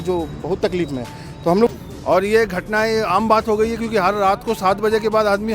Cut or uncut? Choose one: cut